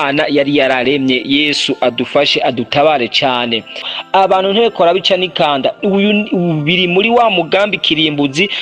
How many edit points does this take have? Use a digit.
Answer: 1